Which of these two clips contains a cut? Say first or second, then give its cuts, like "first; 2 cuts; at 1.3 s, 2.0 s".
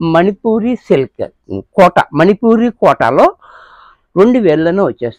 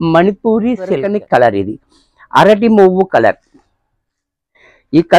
second; 1 cut; at 1.1 s